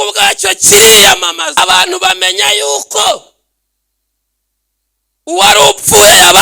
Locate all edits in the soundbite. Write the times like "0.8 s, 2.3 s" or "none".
1.6 s